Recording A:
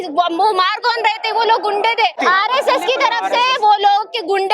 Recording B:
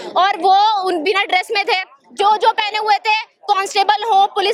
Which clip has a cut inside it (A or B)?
A